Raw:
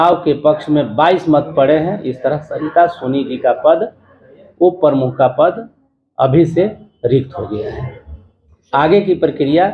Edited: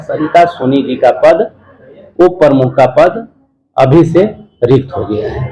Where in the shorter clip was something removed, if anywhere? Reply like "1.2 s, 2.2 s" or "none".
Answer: none

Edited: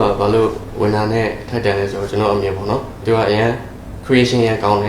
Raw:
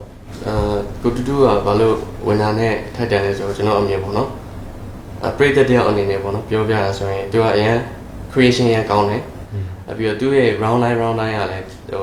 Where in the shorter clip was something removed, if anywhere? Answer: 3.0 s

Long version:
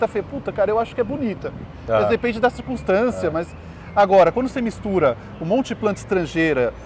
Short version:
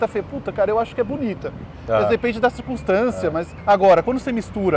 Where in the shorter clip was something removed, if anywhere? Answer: 3.5 s

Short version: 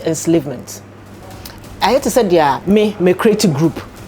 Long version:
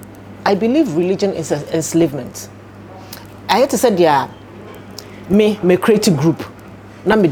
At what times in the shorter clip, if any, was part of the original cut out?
2.6 s

